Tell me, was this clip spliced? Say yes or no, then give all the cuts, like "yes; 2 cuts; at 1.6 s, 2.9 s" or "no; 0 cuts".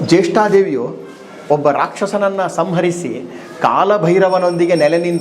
no; 0 cuts